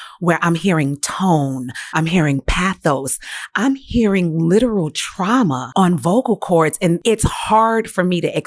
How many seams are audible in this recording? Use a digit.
3